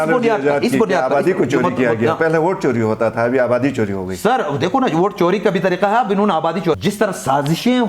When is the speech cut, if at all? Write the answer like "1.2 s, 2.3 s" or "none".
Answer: 6.8 s